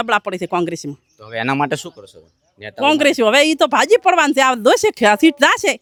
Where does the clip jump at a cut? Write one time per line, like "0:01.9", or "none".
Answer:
none